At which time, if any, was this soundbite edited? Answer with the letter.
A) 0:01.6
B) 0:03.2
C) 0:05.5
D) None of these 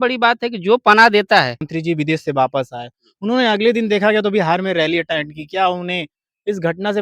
A